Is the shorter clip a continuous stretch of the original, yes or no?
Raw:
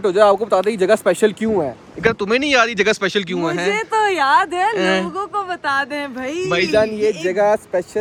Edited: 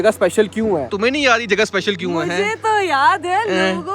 no